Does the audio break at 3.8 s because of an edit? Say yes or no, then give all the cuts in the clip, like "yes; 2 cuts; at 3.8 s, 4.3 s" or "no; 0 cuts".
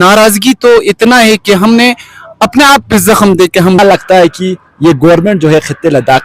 yes; 1 cut; at 3.8 s